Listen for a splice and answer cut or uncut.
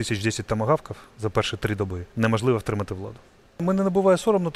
cut